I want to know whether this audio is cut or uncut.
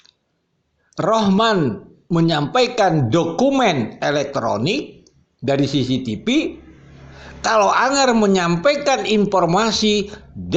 uncut